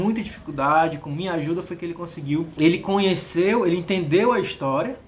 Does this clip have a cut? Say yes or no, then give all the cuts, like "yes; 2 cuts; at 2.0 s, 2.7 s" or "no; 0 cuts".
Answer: yes; 1 cut; at 2.5 s